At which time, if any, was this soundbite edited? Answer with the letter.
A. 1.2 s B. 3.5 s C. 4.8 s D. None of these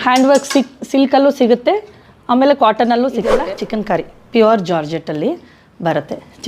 B